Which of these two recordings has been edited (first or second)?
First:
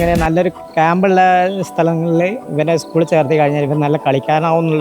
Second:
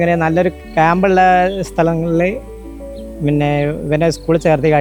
first